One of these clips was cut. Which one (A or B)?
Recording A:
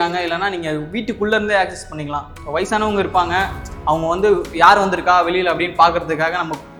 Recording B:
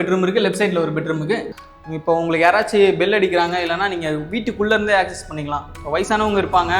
B